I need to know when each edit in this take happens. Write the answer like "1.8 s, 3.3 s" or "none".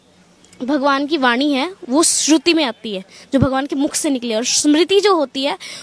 none